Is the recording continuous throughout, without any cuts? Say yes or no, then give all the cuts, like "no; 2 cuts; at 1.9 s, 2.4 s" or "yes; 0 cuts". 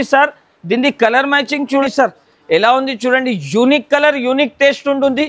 no; 1 cut; at 1.8 s